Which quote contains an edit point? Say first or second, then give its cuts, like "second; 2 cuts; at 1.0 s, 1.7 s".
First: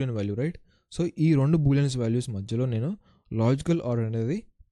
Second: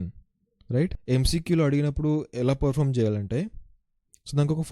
second; 1 cut; at 1.0 s